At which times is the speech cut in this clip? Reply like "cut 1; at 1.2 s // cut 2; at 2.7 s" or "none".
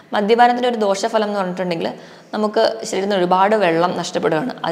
none

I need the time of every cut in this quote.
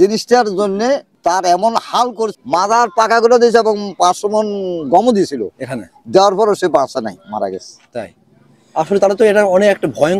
cut 1; at 1.1 s // cut 2; at 2.3 s

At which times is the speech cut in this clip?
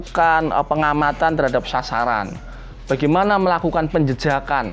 none

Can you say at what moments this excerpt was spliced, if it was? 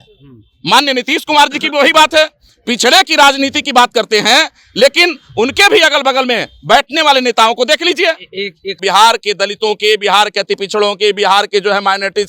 cut 1; at 8.8 s

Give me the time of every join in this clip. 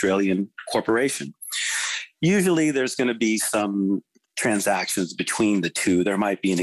none

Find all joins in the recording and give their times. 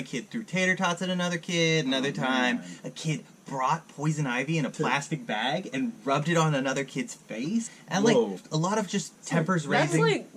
cut 1; at 7.8 s // cut 2; at 8.4 s

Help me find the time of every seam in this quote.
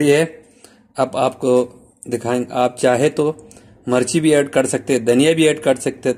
none

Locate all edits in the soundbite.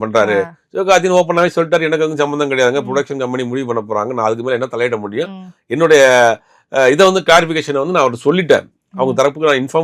none

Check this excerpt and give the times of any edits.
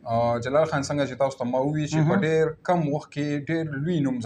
none

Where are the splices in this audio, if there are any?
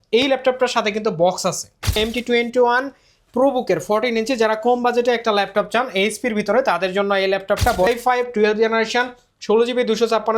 cut 1; at 2.0 s // cut 2; at 7.9 s

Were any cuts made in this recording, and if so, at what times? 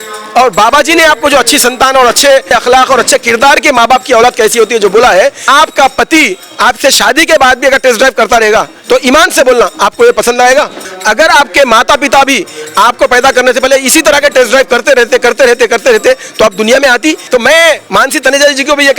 cut 1; at 2.5 s // cut 2; at 5.4 s // cut 3; at 10.9 s // cut 4; at 17.2 s

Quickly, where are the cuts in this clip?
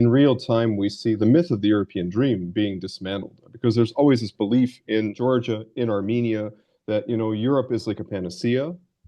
cut 1; at 1.2 s // cut 2; at 5.1 s

